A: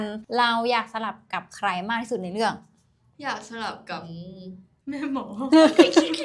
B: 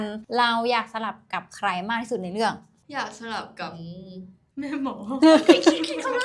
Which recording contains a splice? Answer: B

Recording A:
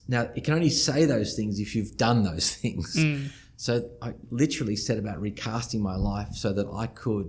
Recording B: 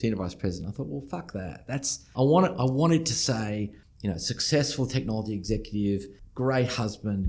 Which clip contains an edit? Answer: B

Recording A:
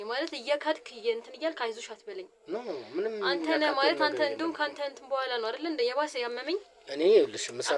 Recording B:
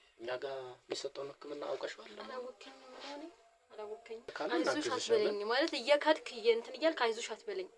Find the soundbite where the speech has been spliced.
B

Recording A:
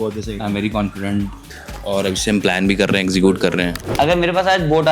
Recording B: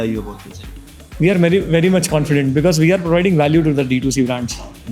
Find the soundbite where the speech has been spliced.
A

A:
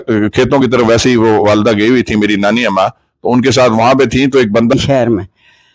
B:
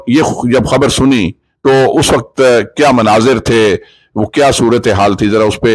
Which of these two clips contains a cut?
A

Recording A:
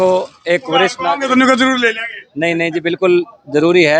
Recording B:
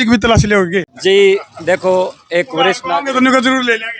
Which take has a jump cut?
B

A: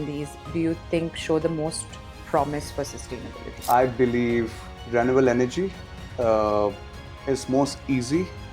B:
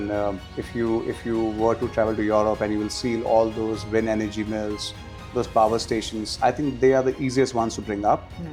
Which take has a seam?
A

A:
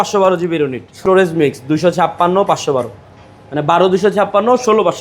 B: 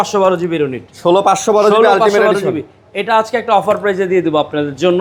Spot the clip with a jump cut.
A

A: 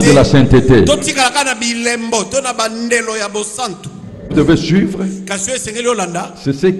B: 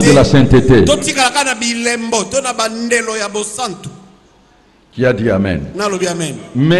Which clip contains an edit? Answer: A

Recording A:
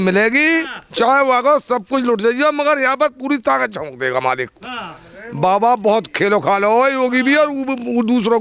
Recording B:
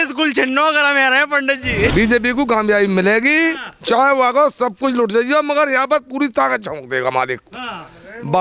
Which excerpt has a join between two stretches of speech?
B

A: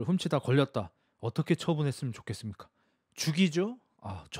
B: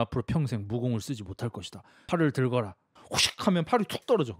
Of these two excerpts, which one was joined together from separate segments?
B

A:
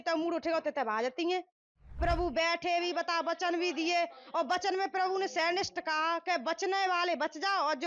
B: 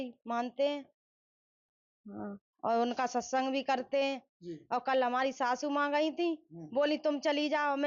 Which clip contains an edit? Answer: A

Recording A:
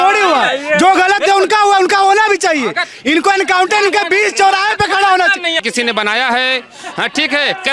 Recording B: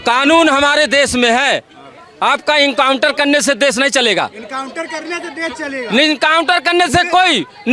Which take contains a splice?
A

